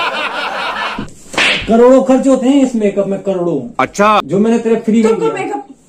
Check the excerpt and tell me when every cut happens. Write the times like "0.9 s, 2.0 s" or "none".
1.0 s

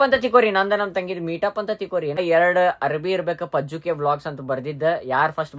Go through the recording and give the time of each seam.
2.2 s

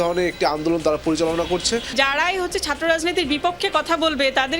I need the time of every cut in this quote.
1.9 s

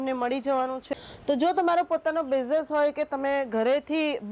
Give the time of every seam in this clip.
1.0 s

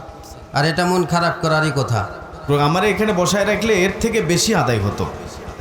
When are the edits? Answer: 2.4 s

